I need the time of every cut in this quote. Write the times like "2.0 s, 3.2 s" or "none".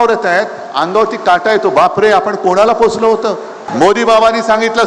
3.6 s